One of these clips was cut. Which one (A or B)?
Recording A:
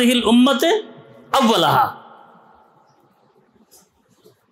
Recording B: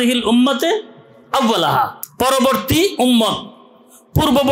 B